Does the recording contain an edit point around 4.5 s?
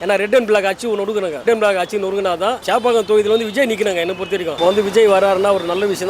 yes; 1 cut; at 4.5 s

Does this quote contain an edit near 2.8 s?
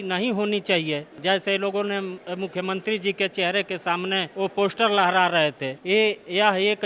no; 3 cuts; at 1.1 s, 4.3 s, 5.7 s

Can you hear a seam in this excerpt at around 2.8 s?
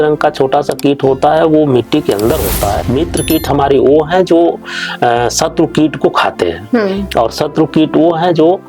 yes; 1 cut; at 2.8 s

